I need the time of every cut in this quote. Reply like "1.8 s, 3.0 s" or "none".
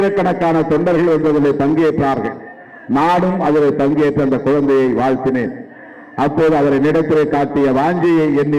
none